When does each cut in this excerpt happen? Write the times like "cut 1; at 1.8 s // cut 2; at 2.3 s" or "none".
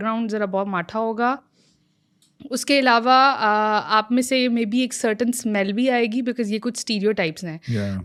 none